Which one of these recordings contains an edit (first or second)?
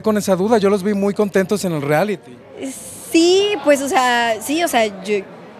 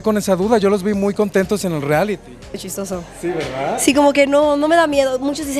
second